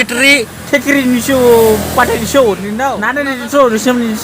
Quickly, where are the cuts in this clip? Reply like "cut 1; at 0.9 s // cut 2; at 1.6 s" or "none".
cut 1; at 3.1 s